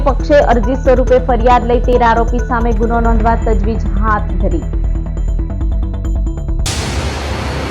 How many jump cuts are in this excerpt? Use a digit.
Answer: 1